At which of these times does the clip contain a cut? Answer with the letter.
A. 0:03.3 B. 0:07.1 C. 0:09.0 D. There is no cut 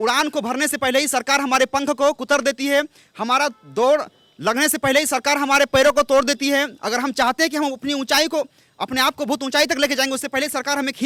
D